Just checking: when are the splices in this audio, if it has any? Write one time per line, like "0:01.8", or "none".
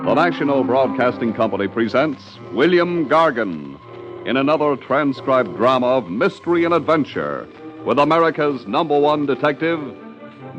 none